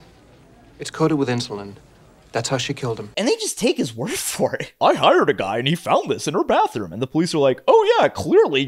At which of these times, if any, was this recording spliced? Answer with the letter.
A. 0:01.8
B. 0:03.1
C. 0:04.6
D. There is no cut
B